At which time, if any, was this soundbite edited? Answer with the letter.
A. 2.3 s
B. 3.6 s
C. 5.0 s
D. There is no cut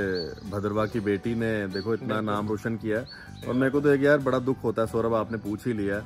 D